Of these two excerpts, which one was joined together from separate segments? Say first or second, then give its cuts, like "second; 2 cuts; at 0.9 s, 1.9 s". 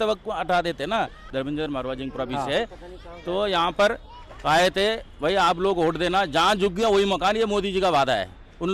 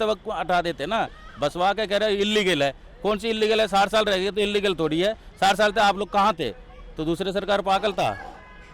first; 1 cut; at 1.2 s